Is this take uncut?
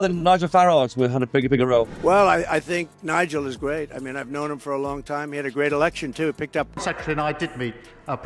no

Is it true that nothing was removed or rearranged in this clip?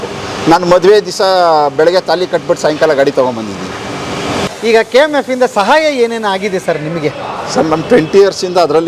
no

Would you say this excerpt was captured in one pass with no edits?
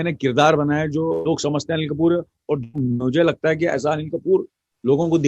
yes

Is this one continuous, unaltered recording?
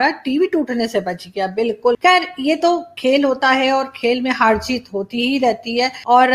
yes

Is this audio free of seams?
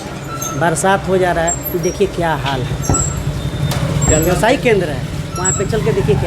yes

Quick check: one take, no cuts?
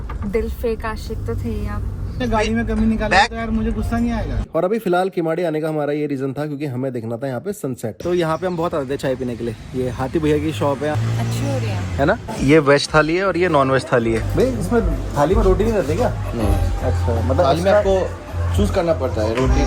no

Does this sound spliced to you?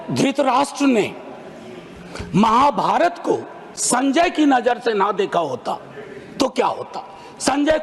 no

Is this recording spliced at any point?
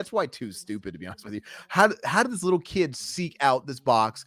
no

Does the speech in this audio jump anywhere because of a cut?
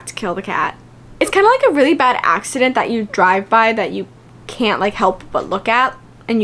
yes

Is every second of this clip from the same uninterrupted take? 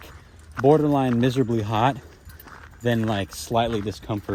yes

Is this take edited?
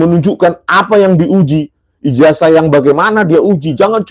no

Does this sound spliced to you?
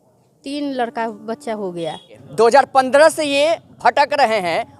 yes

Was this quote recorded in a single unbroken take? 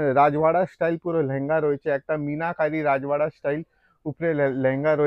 yes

